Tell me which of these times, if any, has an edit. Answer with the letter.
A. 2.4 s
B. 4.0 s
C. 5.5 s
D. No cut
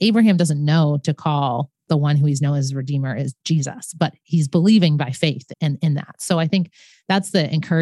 C